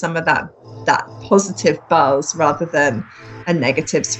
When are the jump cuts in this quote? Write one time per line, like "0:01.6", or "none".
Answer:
none